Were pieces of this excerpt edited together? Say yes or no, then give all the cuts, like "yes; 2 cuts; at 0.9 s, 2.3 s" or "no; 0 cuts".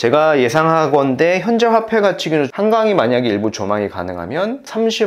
yes; 1 cut; at 2.5 s